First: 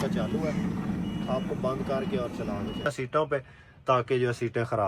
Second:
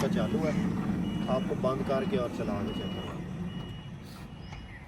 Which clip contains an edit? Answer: first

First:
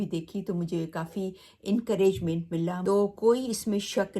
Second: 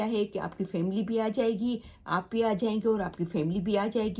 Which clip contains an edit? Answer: first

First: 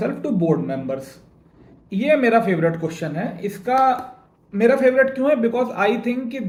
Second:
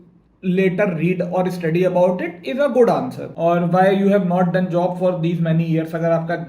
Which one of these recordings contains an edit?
second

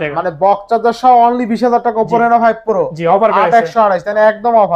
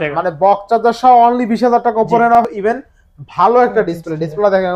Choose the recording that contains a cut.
second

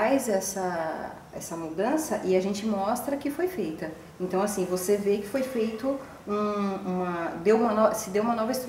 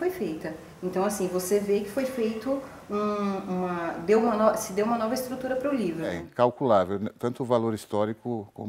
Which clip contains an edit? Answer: second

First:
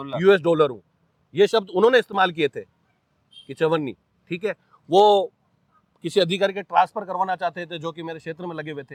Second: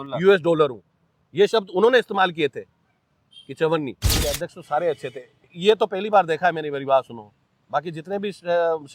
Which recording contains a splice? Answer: second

